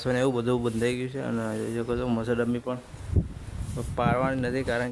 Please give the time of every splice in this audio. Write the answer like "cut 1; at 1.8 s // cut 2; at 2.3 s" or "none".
none